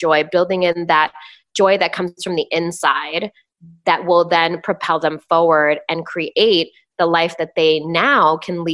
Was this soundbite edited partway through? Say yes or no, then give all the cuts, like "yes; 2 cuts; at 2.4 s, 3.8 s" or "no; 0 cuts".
no; 0 cuts